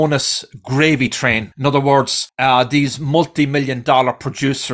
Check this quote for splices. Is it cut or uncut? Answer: cut